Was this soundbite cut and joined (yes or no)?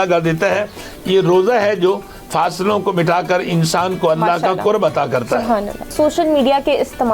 yes